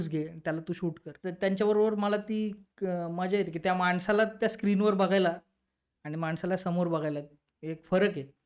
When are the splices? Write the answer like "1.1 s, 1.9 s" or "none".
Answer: 1.1 s